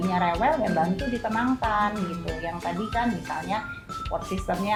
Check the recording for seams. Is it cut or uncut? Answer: uncut